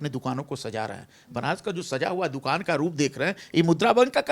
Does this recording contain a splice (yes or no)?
no